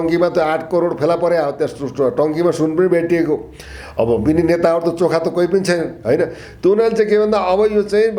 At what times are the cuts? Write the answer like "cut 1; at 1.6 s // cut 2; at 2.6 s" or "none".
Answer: none